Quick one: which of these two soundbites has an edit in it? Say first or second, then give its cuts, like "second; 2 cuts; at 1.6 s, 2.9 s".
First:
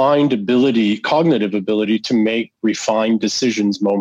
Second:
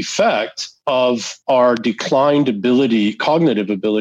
second; 1 cut; at 1.1 s